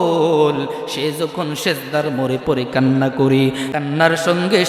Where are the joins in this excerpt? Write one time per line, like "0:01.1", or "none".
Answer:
0:03.7